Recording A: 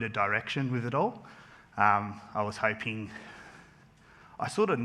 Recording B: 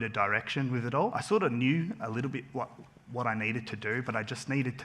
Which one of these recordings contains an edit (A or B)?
B